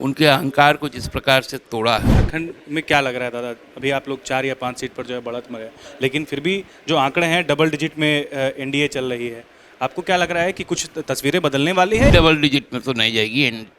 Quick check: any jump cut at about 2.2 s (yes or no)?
yes